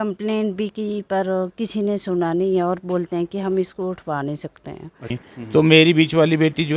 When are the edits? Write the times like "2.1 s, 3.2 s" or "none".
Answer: 5.2 s